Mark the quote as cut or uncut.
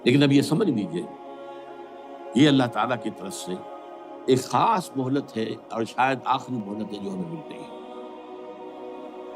uncut